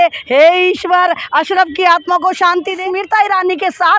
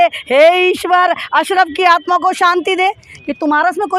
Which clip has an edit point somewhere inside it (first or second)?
first